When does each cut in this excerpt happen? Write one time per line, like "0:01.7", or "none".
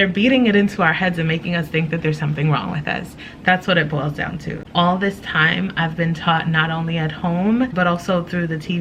0:04.5
0:07.7